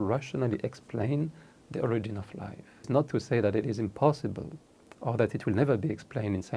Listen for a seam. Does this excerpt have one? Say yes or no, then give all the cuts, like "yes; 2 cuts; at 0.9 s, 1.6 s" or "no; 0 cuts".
yes; 1 cut; at 2.9 s